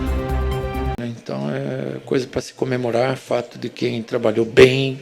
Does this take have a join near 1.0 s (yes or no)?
yes